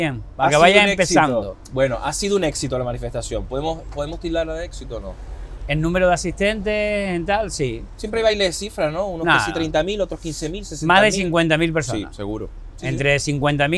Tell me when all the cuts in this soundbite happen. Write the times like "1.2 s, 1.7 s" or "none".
none